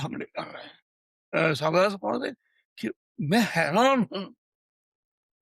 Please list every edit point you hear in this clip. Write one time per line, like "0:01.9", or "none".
0:01.2